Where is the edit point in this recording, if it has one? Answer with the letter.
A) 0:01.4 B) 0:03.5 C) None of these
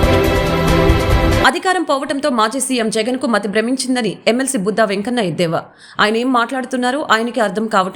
C